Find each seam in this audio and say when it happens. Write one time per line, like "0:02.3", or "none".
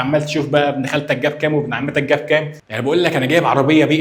0:02.6